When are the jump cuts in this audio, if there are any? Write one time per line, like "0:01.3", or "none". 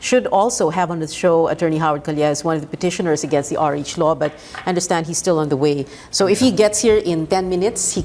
0:04.1